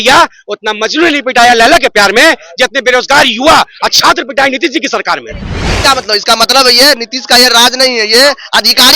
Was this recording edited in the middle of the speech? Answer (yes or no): yes